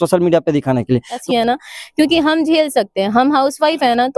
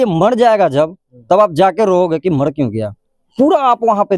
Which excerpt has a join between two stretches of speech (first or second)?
first